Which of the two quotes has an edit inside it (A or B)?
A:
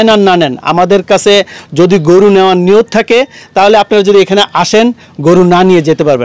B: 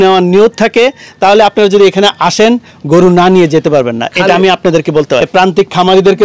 B